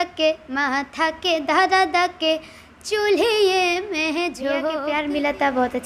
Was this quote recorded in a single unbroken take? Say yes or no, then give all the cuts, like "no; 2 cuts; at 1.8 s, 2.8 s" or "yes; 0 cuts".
no; 1 cut; at 4.9 s